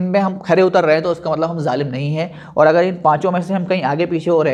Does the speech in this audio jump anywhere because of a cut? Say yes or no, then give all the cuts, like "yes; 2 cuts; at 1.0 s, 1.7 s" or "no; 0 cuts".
no; 0 cuts